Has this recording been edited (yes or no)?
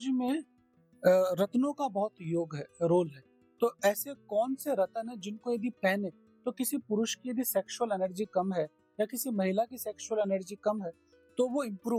no